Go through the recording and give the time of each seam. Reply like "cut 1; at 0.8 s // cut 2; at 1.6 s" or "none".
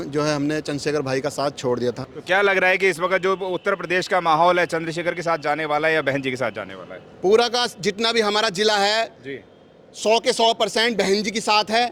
cut 1; at 2.1 s